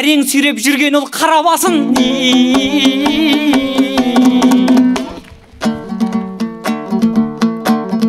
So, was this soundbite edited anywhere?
no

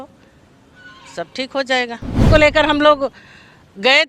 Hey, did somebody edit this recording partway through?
yes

